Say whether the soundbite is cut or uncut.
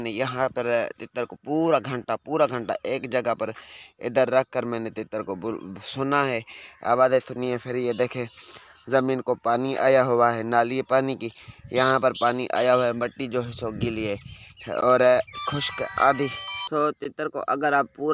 uncut